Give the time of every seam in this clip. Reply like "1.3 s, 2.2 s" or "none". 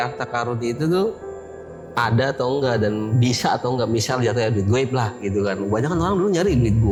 none

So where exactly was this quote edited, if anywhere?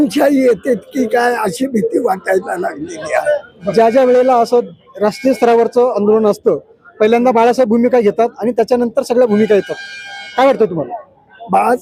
none

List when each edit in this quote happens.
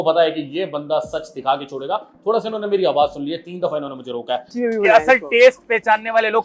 4.6 s

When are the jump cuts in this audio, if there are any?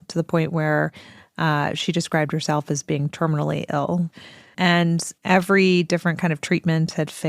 4.1 s

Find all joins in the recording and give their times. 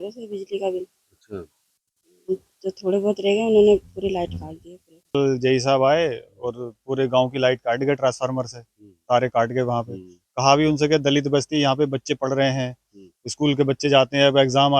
5.1 s

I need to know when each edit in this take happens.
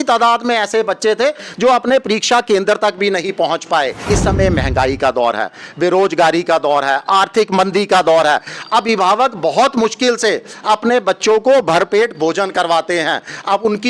4.1 s

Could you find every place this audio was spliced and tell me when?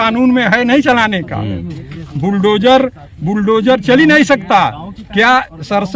none

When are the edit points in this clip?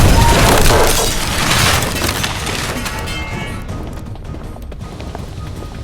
none

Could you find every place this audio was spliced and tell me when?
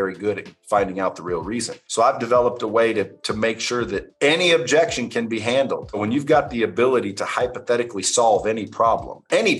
6.0 s

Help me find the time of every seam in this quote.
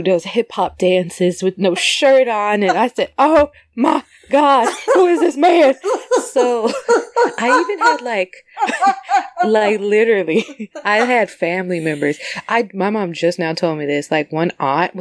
none

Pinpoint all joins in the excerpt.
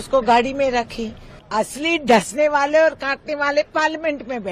1.4 s

